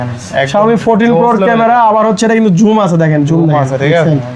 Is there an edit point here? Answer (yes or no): no